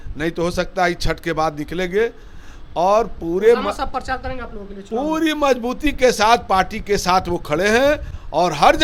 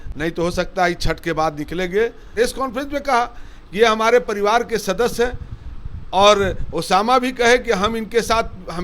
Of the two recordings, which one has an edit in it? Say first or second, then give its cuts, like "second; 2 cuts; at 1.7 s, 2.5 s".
second; 1 cut; at 2.2 s